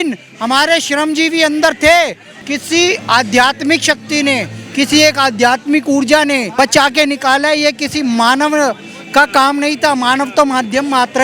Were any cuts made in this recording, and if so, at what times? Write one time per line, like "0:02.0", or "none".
0:02.3
0:06.5